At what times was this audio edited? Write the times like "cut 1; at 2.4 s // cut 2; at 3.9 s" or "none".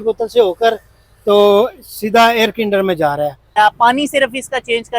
cut 1; at 3.5 s